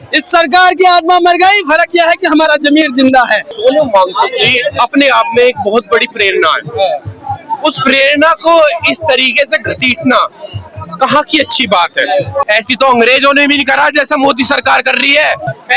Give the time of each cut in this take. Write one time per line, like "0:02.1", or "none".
0:03.5
0:12.4